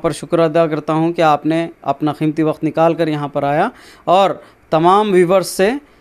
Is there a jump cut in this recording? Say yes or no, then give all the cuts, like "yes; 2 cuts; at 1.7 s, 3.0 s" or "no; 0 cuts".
no; 0 cuts